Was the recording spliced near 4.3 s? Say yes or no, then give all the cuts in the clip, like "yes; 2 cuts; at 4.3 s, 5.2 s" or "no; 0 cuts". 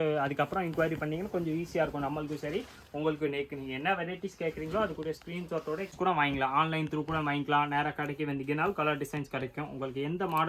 no; 1 cut; at 5.9 s